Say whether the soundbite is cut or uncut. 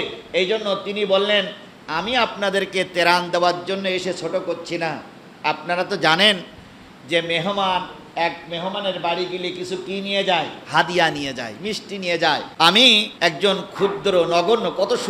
cut